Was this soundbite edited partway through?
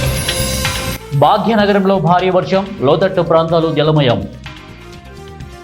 yes; 2 cuts; at 1.0 s, 4.4 s

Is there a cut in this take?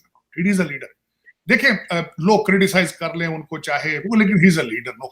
yes; 1 cut; at 4.0 s

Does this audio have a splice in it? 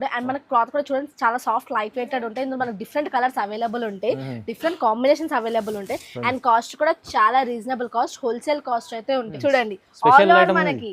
yes; 1 cut; at 9.3 s

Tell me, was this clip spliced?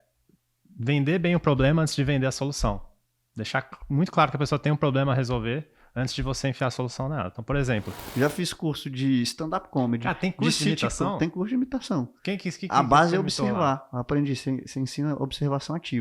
yes; 1 cut; at 8.0 s

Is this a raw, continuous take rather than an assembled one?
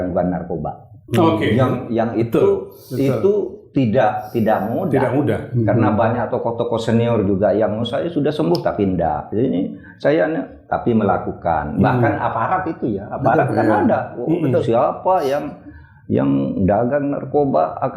yes; 0 cuts

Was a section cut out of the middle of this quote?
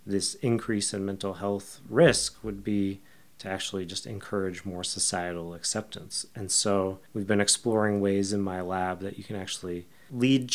no; 0 cuts

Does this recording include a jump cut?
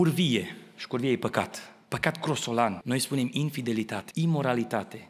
yes; 2 cuts; at 2.8 s, 4.0 s

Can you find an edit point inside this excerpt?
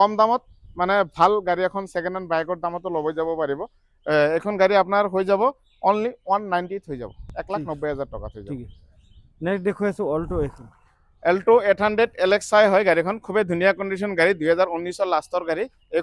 no; 0 cuts

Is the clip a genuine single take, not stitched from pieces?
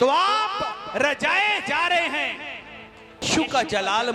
no; 1 cut; at 3.2 s

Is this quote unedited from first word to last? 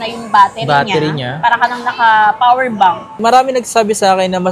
no; 1 cut; at 3.2 s

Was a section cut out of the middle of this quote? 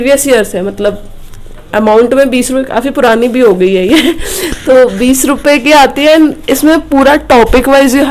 no; 0 cuts

